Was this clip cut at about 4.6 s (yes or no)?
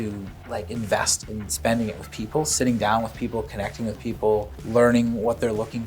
yes